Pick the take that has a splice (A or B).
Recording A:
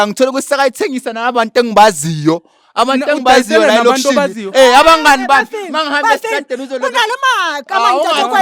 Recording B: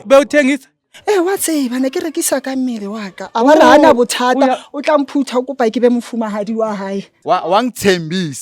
B